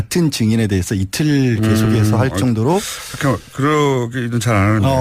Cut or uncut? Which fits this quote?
uncut